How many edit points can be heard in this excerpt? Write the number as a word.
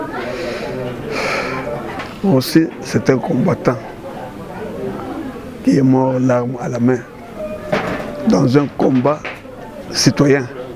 one